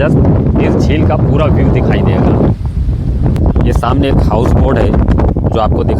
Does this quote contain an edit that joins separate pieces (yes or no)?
yes